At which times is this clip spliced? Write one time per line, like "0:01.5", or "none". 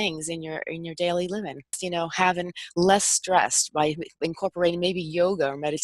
0:01.8